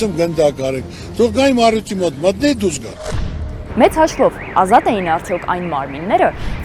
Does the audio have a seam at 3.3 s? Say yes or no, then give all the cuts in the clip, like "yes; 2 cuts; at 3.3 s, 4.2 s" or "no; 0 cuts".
yes; 1 cut; at 3.3 s